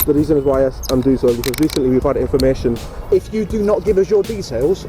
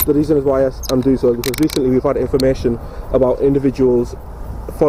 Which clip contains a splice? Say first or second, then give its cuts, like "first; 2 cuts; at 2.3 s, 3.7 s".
first; 1 cut; at 2.9 s